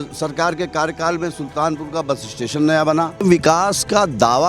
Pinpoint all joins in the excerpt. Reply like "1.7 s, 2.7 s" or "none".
3.2 s